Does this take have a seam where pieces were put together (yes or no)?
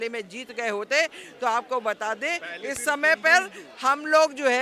no